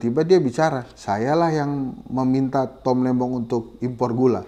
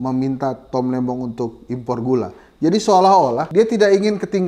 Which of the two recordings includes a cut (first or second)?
second